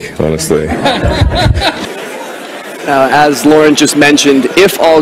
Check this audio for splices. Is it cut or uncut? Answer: cut